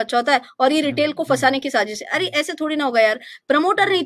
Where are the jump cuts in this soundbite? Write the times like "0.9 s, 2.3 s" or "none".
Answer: none